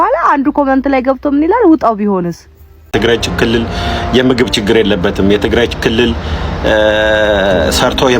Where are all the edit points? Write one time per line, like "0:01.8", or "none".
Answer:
0:02.9